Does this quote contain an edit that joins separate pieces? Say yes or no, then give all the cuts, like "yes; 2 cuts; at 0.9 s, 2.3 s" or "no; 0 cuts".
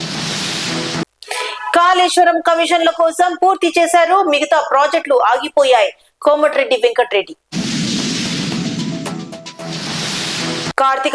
yes; 1 cut; at 0.9 s